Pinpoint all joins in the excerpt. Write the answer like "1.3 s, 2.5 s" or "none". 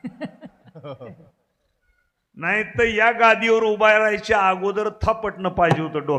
none